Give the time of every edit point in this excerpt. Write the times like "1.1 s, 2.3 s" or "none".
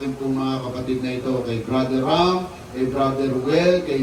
none